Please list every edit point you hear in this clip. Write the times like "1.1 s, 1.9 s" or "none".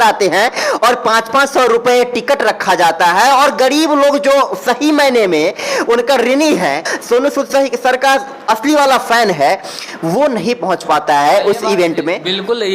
6.9 s